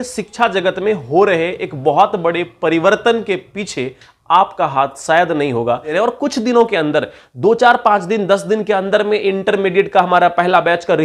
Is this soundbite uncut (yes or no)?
no